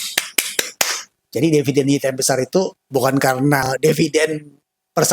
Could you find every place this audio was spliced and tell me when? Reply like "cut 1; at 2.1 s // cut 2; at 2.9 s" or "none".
cut 1; at 3.7 s